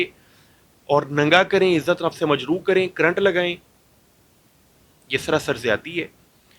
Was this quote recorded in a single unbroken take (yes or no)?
yes